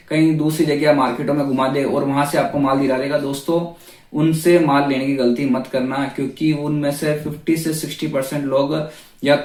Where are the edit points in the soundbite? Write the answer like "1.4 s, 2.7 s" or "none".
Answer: none